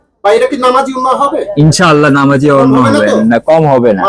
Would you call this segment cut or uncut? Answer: uncut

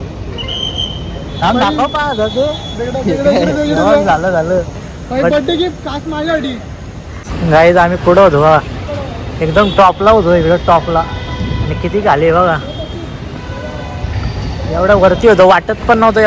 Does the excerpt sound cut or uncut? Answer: cut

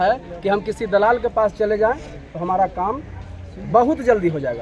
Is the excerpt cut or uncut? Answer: uncut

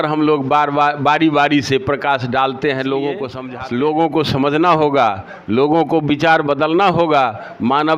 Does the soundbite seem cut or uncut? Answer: cut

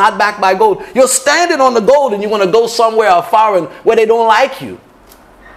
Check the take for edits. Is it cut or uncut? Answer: uncut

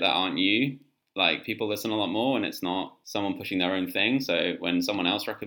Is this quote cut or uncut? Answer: cut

